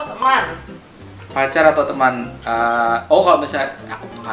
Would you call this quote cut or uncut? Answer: uncut